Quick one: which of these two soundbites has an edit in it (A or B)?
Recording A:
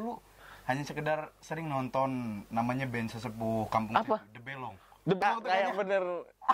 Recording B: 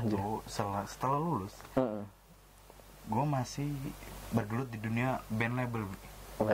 A